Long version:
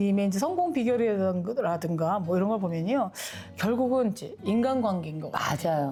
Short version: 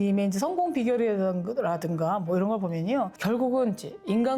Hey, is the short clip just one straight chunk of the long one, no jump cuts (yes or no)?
no